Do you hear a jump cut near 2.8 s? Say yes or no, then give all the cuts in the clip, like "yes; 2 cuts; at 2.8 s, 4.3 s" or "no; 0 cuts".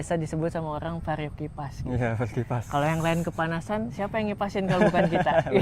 no; 0 cuts